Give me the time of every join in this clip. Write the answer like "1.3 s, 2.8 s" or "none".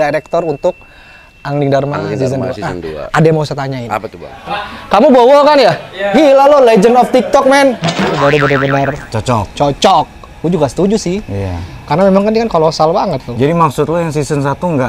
4.3 s, 8.0 s